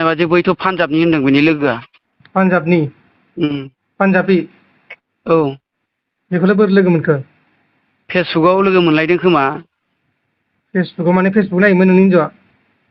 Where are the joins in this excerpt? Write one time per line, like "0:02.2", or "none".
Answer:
none